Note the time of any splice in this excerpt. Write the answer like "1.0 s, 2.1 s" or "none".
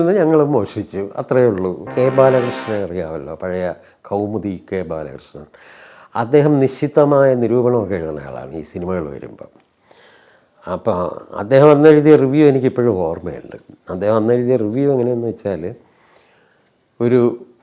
1.9 s